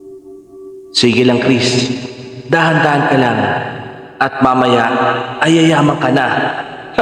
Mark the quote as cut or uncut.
cut